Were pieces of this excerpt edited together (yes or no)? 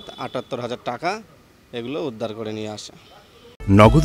no